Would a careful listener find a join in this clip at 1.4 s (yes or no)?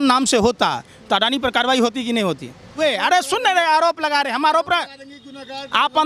no